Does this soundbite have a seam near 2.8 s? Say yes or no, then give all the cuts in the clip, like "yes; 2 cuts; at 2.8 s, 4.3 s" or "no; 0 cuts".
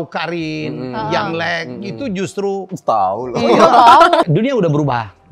no; 1 cut; at 4.2 s